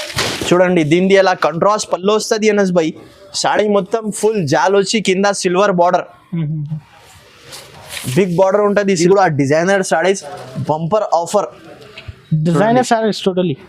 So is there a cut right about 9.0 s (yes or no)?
yes